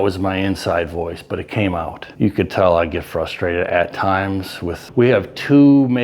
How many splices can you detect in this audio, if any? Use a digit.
2